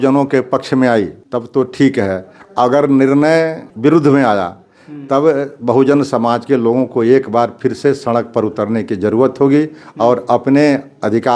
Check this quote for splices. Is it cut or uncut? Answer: cut